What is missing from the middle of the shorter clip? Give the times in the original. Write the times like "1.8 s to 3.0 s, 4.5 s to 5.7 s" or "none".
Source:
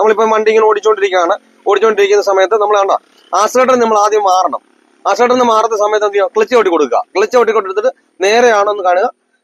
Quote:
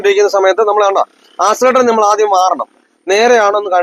4.9 s to 8.1 s